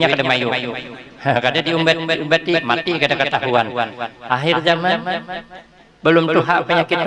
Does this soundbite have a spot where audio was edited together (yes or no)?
no